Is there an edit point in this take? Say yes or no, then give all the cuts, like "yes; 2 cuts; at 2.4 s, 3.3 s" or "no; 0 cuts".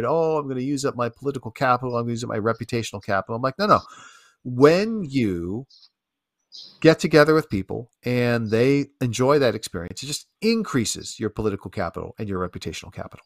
no; 0 cuts